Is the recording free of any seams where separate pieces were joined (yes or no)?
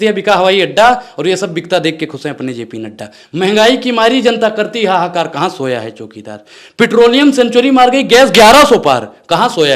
yes